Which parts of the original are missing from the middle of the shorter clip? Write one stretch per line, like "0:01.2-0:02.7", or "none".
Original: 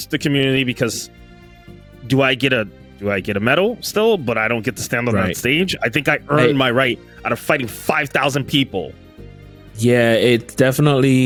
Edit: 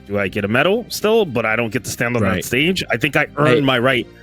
none